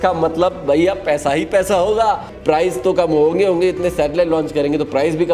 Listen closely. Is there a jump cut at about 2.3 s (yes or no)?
yes